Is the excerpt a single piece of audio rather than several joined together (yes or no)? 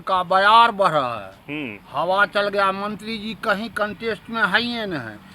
yes